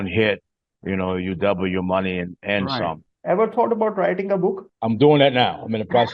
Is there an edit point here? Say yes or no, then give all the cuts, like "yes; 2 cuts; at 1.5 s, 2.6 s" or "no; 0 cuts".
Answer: yes; 2 cuts; at 3.1 s, 4.7 s